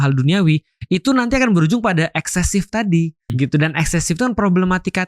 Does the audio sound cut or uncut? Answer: cut